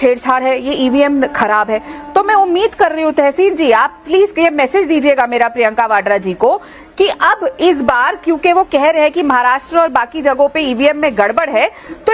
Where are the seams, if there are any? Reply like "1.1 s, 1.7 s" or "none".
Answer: none